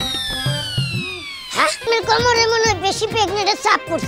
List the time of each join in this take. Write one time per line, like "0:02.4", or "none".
0:01.8